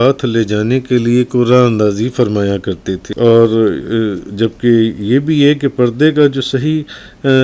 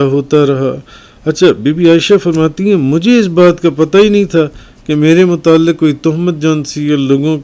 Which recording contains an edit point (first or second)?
first